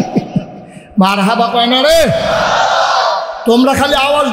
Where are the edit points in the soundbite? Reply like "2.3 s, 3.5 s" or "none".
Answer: none